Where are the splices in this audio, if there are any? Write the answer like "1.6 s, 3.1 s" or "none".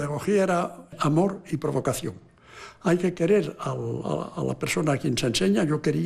0.9 s